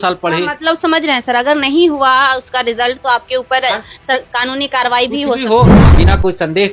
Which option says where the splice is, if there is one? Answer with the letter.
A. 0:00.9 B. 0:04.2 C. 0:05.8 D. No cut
C